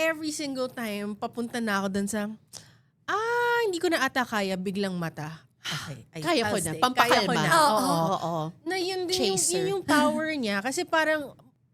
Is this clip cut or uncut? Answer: uncut